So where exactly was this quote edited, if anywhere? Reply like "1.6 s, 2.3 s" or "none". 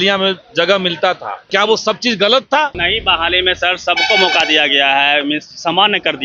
1.4 s, 2.8 s